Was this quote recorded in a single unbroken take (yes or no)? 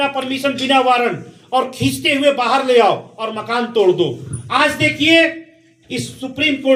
yes